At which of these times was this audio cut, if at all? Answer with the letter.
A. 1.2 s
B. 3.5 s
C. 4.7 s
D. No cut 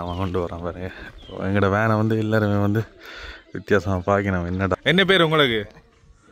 C